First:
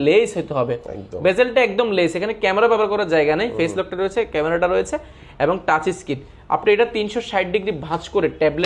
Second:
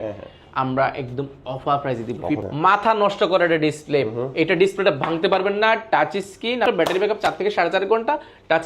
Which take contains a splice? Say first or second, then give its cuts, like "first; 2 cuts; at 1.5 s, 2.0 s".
second; 2 cuts; at 2.4 s, 6.7 s